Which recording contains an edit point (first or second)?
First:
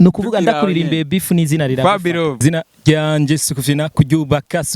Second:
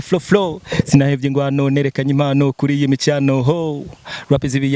first